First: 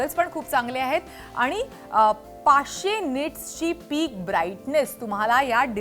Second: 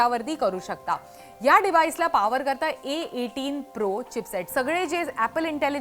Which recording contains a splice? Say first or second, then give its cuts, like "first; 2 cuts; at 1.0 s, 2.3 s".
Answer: second; 1 cut; at 4.5 s